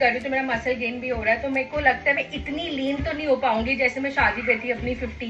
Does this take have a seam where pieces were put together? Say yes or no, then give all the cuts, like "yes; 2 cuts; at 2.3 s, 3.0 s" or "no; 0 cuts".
no; 0 cuts